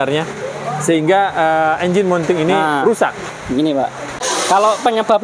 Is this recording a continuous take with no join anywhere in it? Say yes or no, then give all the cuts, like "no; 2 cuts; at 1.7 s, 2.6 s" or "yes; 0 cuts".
no; 1 cut; at 4.2 s